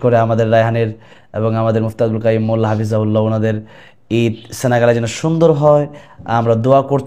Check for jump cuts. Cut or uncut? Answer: uncut